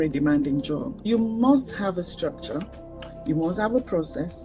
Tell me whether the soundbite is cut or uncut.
cut